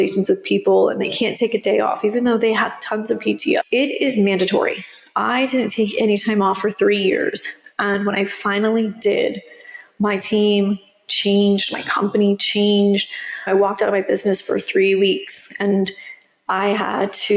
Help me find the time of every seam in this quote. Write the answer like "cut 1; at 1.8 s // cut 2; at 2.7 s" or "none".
cut 1; at 3.6 s // cut 2; at 13.5 s